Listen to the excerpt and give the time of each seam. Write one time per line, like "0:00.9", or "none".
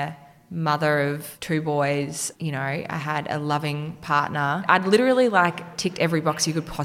0:01.3
0:04.6